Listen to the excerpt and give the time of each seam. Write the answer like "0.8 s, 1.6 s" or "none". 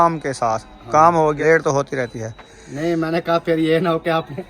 1.4 s